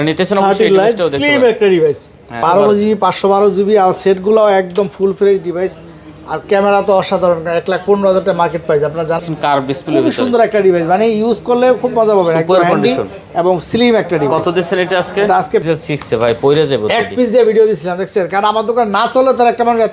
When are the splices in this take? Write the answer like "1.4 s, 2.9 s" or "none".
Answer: 2.4 s, 9.2 s, 15.6 s